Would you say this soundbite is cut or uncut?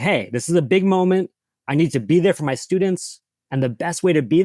uncut